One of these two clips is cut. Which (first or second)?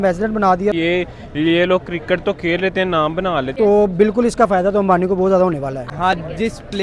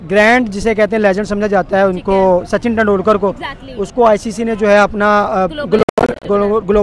first